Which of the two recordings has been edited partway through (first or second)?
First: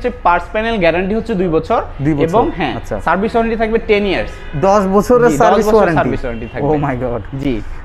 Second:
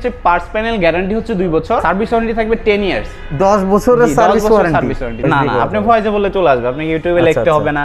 second